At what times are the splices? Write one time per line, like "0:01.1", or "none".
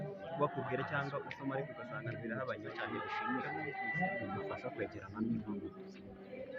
0:02.7